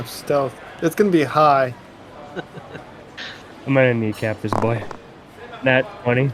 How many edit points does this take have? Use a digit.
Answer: 1